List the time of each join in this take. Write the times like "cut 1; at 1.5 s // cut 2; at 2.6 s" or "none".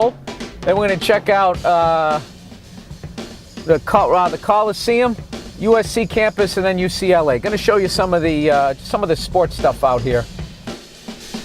cut 1; at 2.5 s